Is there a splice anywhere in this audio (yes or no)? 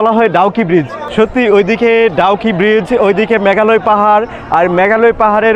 yes